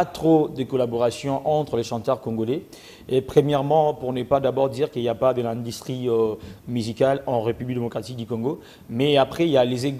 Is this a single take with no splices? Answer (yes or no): yes